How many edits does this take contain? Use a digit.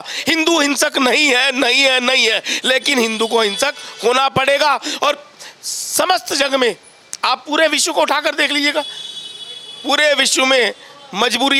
0